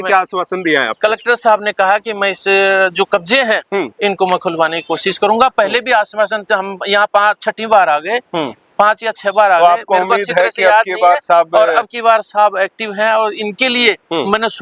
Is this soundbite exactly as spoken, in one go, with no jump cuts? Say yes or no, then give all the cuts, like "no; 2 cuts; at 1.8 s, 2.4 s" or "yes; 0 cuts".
yes; 0 cuts